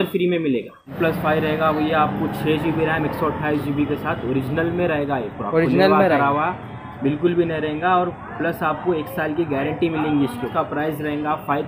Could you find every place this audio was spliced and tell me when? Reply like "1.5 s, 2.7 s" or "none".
0.8 s, 10.5 s